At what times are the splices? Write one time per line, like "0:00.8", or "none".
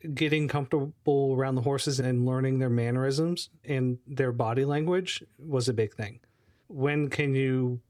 none